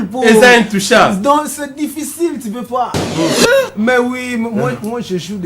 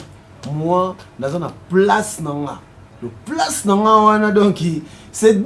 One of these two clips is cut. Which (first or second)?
first